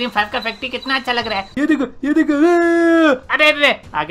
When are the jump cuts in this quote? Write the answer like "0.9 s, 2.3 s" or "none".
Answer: 1.5 s

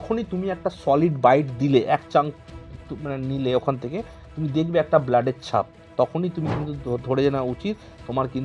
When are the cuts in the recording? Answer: none

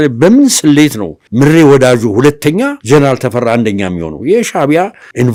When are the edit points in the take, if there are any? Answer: none

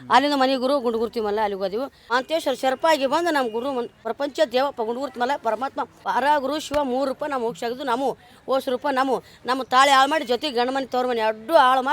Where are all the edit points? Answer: 2.0 s, 4.0 s, 5.9 s

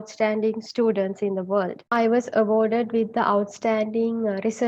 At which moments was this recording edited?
1.9 s

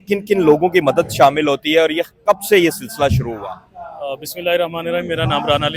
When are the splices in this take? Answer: none

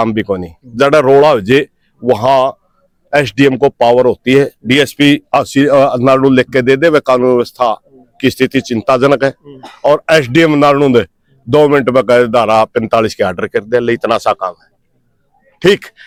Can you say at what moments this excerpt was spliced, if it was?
none

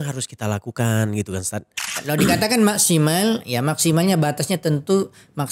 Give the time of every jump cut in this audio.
1.9 s

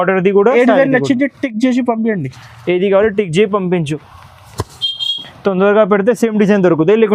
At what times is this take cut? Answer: none

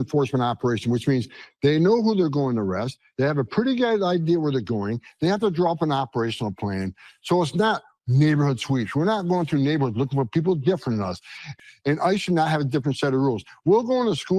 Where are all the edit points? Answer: 11.4 s

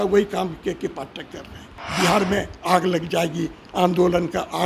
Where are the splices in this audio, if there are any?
1.8 s

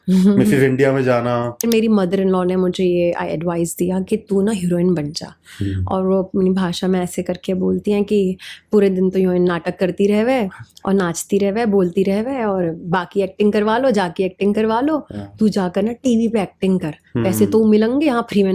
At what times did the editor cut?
1.7 s

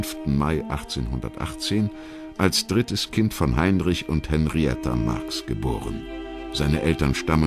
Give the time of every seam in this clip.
5.6 s

